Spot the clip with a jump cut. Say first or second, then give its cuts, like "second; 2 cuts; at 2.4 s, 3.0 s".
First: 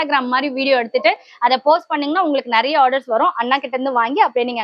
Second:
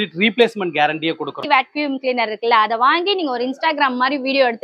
second; 1 cut; at 1.4 s